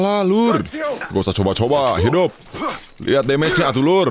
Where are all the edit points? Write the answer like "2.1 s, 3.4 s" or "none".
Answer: 1.0 s